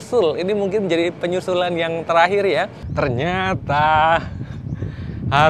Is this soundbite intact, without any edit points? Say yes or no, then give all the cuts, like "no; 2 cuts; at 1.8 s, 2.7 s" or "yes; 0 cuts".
no; 1 cut; at 2.8 s